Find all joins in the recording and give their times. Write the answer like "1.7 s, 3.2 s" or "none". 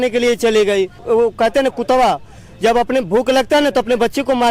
1.0 s